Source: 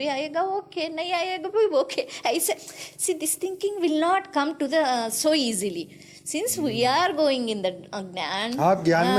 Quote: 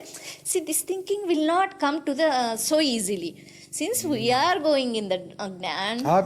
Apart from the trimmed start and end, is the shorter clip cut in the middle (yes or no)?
no